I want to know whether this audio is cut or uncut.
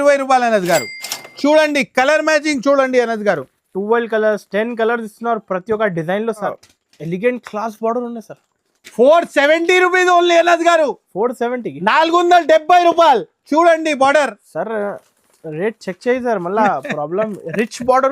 cut